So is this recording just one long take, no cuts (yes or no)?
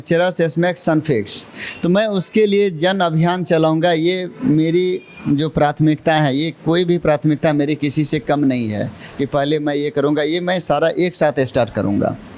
yes